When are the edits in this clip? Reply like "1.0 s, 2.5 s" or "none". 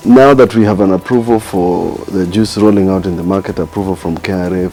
none